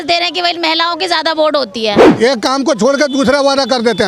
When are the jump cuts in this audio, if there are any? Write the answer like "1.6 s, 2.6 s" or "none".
2.1 s